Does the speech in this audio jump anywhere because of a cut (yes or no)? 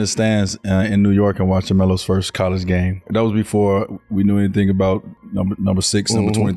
yes